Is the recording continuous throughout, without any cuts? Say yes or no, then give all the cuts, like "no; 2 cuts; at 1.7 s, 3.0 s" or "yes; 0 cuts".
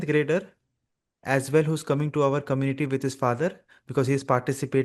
yes; 0 cuts